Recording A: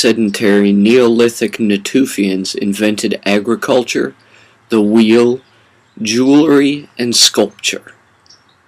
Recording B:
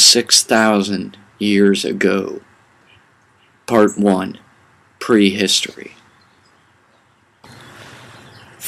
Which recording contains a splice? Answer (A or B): A